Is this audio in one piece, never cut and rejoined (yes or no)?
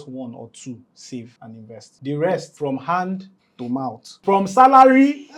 no